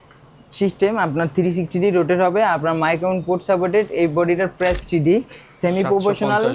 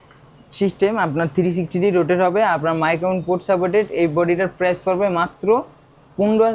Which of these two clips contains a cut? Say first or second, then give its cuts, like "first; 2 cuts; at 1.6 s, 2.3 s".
first; 1 cut; at 4.8 s